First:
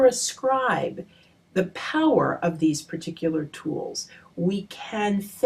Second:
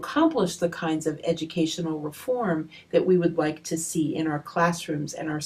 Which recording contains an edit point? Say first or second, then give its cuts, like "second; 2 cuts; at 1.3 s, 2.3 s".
second; 1 cut; at 1.6 s